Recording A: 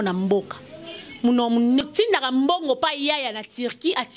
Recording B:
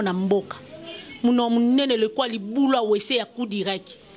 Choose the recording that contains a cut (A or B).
A